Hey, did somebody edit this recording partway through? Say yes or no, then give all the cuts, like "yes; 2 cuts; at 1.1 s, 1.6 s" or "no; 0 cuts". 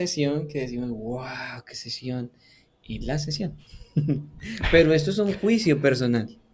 no; 0 cuts